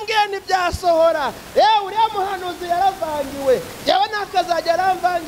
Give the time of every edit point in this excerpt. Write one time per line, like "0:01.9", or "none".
none